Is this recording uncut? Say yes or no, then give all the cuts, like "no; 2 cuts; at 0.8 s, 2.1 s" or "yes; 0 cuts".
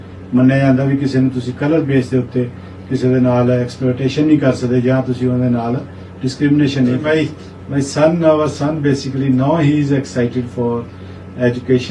no; 1 cut; at 7.0 s